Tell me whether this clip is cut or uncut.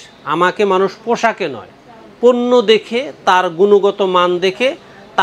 uncut